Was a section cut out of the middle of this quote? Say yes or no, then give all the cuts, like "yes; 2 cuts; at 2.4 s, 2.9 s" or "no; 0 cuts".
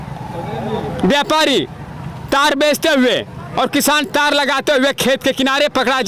no; 0 cuts